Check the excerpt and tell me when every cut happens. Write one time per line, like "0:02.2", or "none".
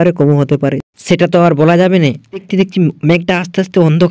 0:02.5